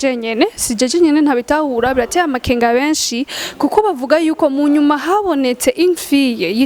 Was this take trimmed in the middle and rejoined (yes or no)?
no